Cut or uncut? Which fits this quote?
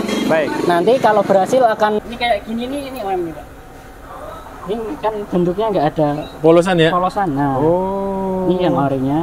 cut